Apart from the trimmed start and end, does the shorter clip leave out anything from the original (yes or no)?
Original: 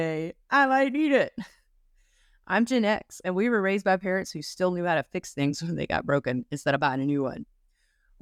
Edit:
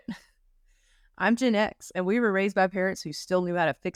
no